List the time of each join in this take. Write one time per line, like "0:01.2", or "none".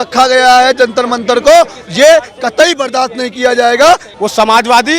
0:04.1